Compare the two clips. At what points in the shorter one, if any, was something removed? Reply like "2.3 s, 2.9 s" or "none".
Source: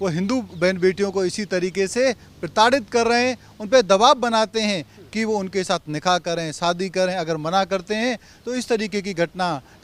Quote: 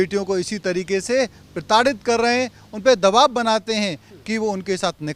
none